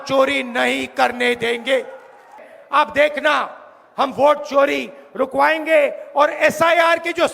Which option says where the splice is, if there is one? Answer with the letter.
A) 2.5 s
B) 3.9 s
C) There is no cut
A